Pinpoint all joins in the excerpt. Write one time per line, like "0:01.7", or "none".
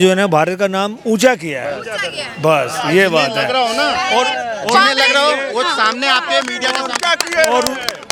none